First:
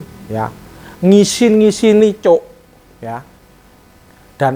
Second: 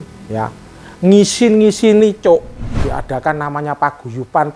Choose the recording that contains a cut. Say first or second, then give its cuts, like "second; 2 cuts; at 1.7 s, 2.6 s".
second; 1 cut; at 2.6 s